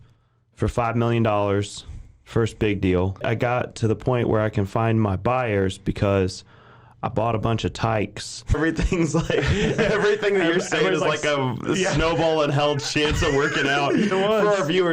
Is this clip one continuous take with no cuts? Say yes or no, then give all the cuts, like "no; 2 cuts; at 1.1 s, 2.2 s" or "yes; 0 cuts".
no; 3 cuts; at 3.2 s, 8.6 s, 14.1 s